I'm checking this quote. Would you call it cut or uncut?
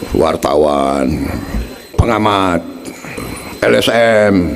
cut